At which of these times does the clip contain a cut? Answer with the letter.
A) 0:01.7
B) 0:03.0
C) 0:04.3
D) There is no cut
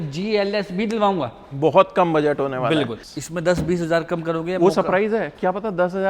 B